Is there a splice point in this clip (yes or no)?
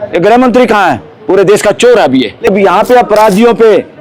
yes